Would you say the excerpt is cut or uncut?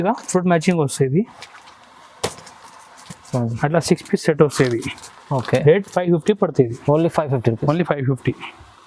uncut